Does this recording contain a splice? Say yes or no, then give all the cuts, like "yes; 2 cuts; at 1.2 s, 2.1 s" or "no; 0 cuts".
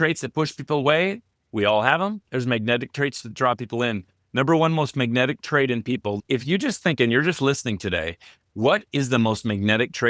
yes; 1 cut; at 6.2 s